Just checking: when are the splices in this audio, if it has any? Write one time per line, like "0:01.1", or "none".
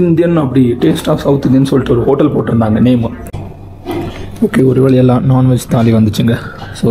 0:03.2